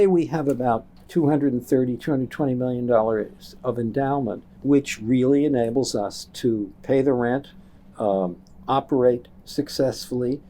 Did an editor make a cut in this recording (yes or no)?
yes